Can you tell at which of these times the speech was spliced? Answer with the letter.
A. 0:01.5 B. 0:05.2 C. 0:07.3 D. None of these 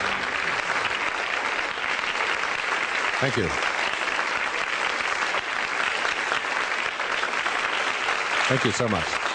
A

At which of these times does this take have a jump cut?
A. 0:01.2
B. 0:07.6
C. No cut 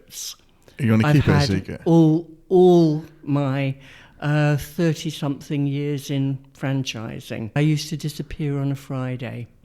B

